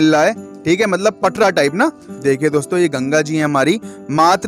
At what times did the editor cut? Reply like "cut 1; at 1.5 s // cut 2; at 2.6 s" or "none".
cut 1; at 2.1 s